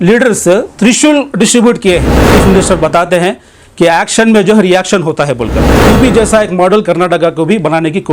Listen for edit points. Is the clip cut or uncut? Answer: cut